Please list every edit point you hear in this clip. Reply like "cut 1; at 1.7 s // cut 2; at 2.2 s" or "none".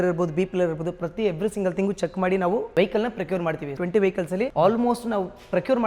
cut 1; at 3.8 s